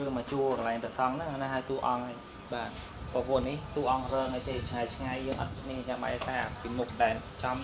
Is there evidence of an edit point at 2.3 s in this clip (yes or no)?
yes